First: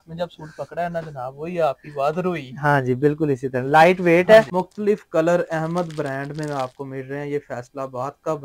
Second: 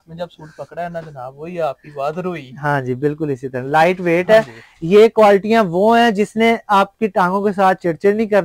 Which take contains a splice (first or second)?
first